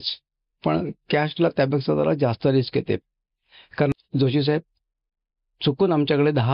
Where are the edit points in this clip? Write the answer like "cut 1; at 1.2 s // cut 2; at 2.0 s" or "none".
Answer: cut 1; at 3.9 s